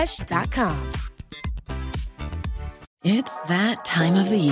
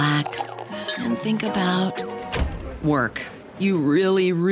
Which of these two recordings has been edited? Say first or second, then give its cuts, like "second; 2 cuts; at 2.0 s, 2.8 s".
first; 1 cut; at 2.8 s